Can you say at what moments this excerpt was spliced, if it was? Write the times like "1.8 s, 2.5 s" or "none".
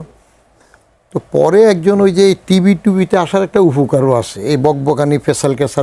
none